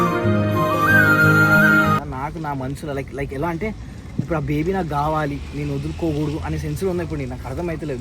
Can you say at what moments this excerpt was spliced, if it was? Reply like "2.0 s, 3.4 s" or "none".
2.1 s